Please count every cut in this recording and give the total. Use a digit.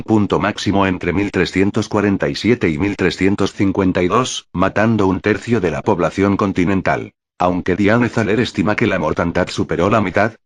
1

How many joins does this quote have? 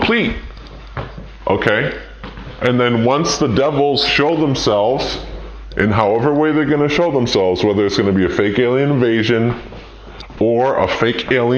1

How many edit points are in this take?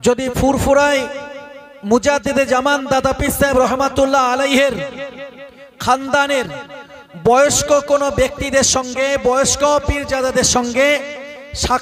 0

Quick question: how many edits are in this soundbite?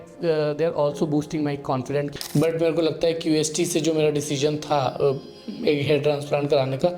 1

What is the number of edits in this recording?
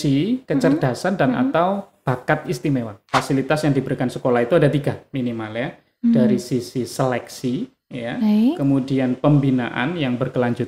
1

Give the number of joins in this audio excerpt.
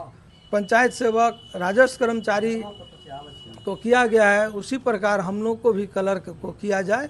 0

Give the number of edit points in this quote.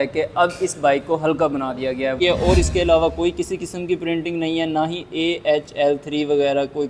1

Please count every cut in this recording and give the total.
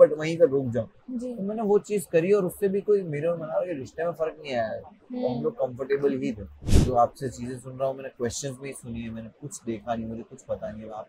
1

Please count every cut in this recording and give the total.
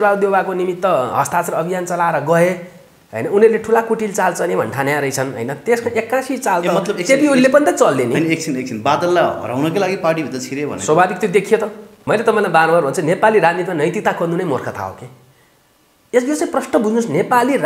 1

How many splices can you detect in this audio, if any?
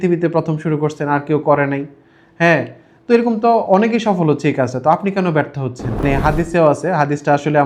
1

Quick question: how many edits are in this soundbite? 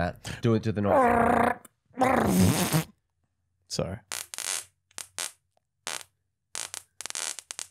0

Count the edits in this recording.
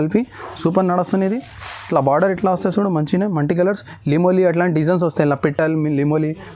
0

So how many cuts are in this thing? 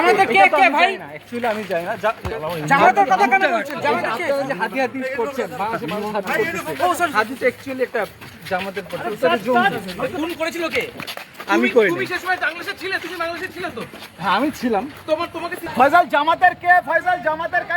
1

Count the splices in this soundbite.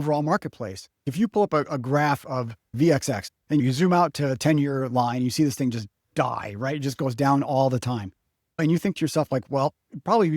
4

